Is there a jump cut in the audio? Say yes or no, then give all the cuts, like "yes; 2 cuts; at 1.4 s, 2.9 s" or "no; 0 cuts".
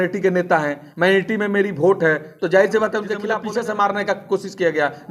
yes; 1 cut; at 3.4 s